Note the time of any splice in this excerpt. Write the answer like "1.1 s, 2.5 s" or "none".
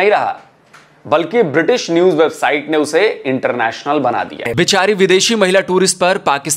4.4 s